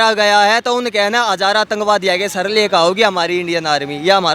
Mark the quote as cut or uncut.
uncut